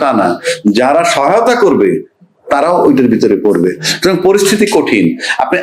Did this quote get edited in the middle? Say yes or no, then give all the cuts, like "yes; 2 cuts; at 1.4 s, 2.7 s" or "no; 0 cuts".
no; 0 cuts